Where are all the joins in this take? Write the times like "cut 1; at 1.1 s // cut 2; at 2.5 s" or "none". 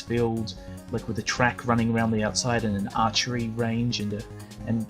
cut 1; at 2.9 s